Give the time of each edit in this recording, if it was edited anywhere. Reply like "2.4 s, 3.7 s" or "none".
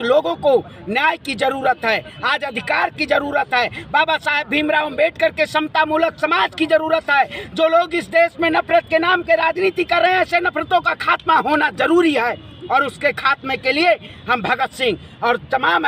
none